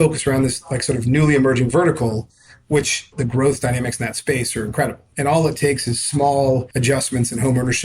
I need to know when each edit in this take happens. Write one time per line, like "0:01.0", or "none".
0:03.1
0:05.1
0:06.7